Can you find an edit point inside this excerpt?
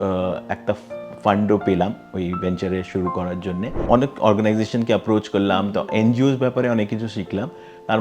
yes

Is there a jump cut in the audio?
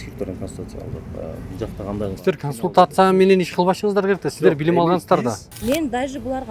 yes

